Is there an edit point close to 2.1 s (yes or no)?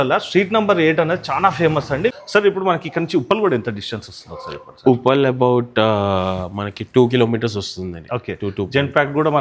yes